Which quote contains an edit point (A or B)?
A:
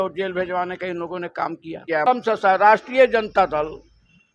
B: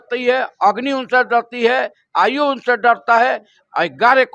A